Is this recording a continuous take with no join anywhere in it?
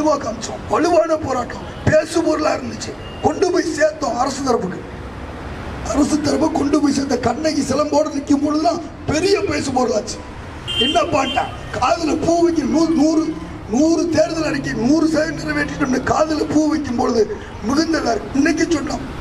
yes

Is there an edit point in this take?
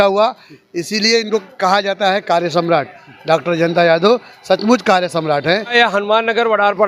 yes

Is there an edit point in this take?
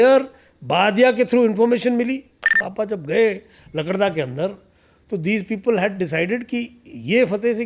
yes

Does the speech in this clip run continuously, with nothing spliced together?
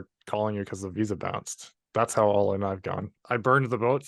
no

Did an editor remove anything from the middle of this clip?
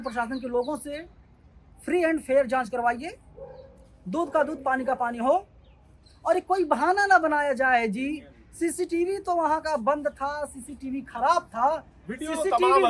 no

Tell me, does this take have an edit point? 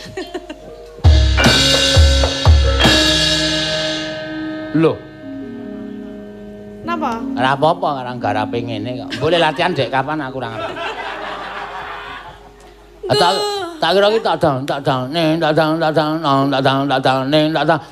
yes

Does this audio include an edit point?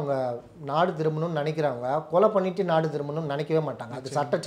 no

